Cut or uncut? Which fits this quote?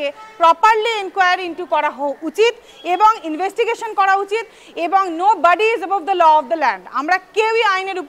uncut